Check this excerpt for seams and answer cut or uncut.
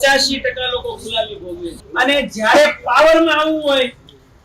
cut